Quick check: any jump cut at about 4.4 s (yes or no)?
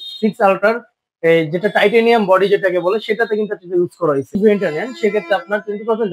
yes